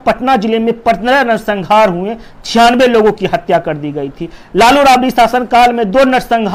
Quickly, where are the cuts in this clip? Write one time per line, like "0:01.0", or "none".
none